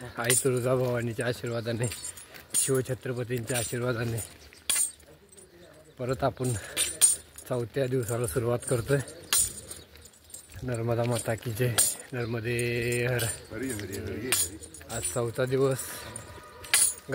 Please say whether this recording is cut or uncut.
uncut